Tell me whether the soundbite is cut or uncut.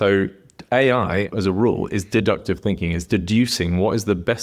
cut